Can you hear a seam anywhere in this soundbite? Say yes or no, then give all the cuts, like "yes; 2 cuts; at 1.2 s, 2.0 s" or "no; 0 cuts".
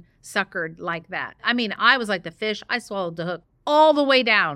yes; 1 cut; at 3.5 s